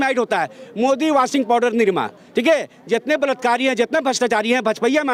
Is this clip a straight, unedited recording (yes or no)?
yes